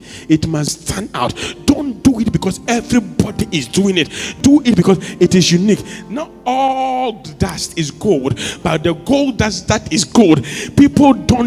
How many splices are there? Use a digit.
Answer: 1